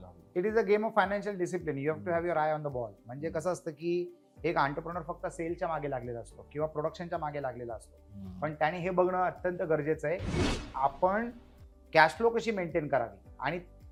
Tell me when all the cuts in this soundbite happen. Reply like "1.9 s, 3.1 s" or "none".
none